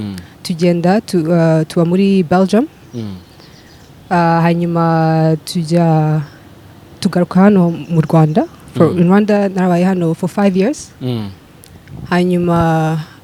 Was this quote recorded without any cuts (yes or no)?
yes